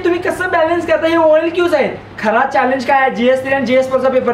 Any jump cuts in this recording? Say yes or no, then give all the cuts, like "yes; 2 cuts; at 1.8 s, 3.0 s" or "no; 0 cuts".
yes; 1 cut; at 2.1 s